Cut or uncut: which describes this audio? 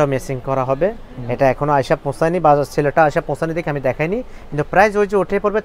uncut